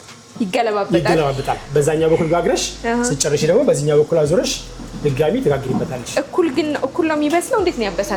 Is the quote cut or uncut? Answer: uncut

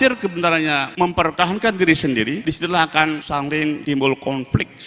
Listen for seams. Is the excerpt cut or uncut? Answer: cut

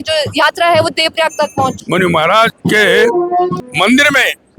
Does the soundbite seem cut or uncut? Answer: cut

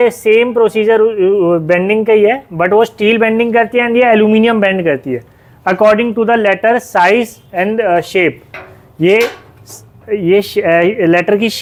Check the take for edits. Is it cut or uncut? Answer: uncut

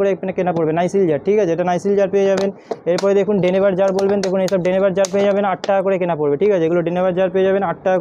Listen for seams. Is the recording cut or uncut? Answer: uncut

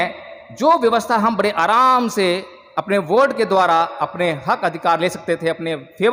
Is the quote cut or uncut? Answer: uncut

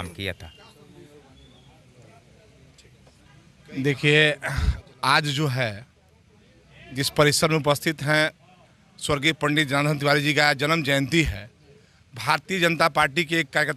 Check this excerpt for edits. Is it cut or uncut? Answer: uncut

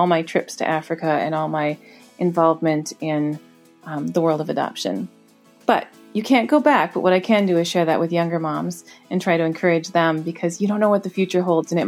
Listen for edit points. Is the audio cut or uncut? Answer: uncut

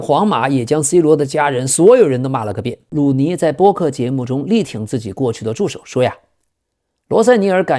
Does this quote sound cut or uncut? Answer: cut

